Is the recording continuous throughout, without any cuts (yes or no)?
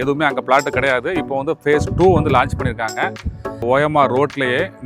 no